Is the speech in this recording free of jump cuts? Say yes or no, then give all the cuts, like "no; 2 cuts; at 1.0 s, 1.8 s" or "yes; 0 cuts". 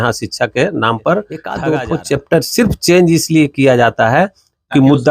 no; 1 cut; at 1.5 s